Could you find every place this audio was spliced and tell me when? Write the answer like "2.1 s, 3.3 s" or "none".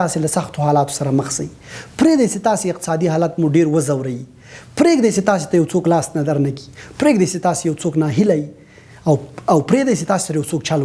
none